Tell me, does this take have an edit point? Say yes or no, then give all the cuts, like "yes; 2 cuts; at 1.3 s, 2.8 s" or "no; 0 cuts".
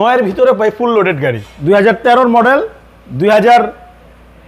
yes; 1 cut; at 1.5 s